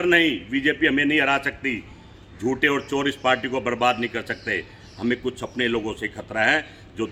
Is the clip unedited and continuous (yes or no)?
yes